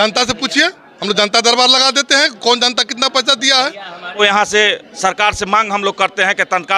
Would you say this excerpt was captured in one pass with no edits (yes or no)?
no